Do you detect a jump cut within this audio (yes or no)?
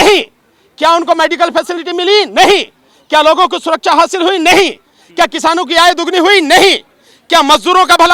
no